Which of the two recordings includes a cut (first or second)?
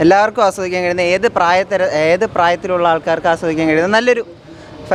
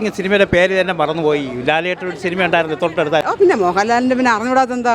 second